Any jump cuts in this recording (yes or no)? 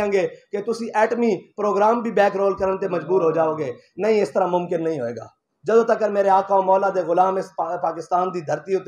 no